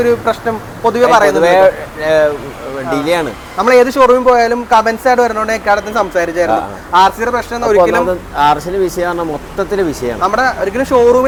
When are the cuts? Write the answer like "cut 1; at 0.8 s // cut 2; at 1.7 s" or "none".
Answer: none